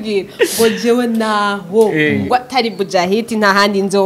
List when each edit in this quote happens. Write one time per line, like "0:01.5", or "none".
none

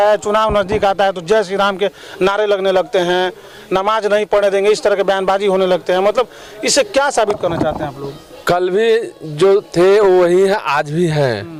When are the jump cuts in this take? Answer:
none

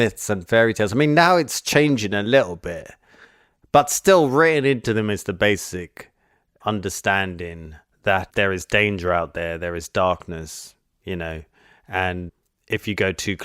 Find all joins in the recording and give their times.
0:08.2
0:12.3

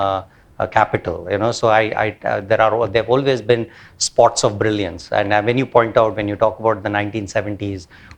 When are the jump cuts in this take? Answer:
none

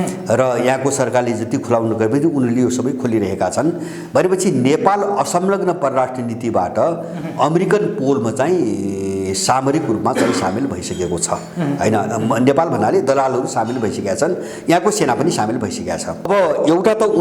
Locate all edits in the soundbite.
0:16.3

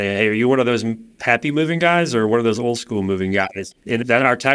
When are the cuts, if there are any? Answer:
0:03.4

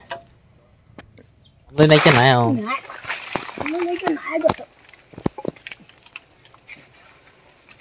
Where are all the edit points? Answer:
0:01.8

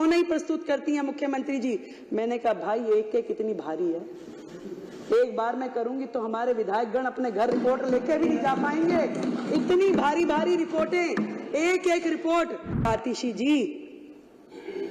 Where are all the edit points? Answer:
0:12.9

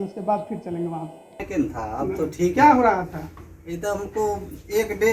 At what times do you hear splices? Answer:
0:01.4

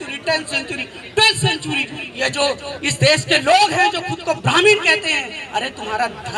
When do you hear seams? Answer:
0:02.0

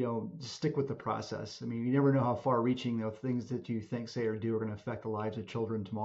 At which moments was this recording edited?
none

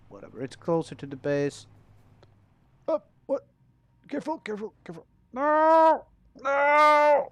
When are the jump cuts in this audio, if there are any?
none

